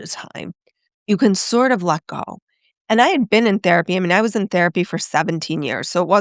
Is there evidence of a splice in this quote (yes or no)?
no